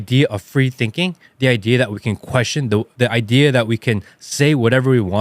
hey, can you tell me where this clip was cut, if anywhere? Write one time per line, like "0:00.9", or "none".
0:02.9